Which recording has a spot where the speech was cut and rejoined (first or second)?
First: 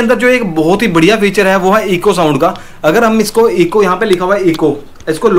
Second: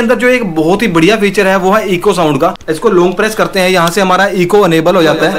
second